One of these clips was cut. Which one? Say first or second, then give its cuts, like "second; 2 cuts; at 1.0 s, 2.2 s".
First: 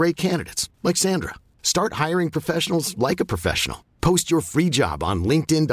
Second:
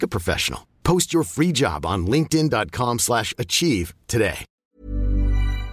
second; 1 cut; at 4.5 s